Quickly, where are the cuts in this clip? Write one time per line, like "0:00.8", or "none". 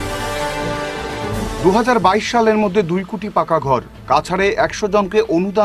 0:01.3